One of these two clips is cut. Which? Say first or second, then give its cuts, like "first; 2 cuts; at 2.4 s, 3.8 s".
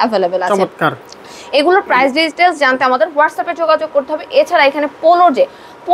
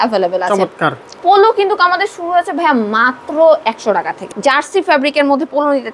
second; 2 cuts; at 1.0 s, 4.3 s